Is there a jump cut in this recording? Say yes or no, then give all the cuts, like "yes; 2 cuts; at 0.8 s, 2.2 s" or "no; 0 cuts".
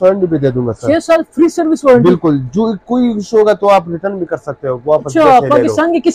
no; 0 cuts